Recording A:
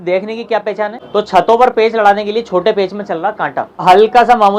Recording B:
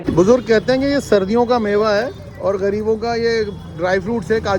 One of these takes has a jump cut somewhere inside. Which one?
A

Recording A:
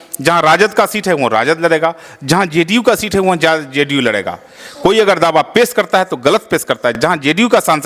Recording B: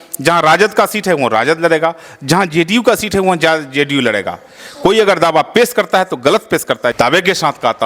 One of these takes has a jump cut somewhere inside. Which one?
B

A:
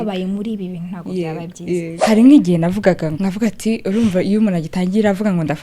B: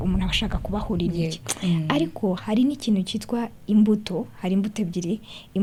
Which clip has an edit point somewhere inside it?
A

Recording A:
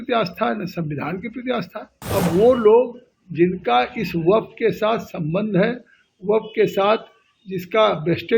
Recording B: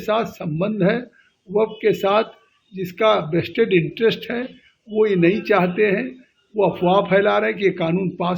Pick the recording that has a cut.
A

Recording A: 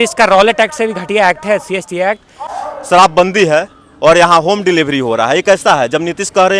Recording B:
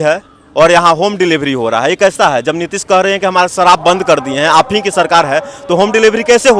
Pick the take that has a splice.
A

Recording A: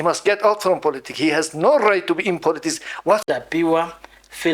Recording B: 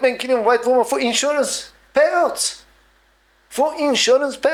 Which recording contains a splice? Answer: A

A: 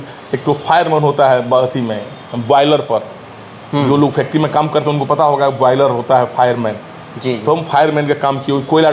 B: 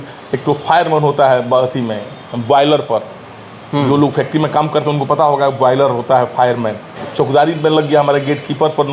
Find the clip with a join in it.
B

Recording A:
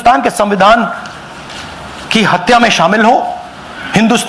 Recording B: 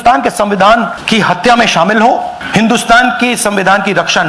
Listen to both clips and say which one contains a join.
B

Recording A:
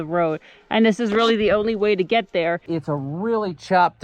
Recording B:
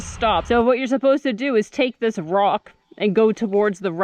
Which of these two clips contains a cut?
A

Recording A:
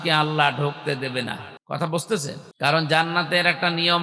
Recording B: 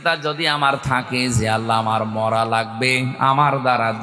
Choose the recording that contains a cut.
A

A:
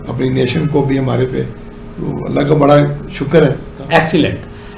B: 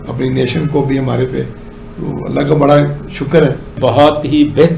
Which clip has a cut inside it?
B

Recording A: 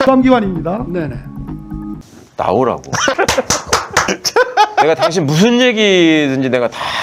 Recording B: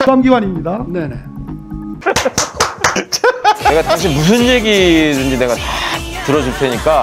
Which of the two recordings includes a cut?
A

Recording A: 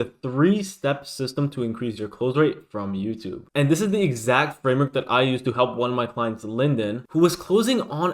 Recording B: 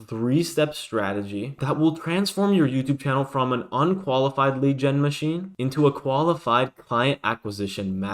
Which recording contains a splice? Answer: A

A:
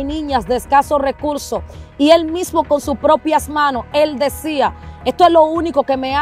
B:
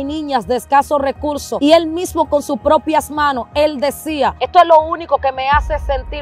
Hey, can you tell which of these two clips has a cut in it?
B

